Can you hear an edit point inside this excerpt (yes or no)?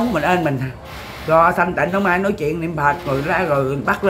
no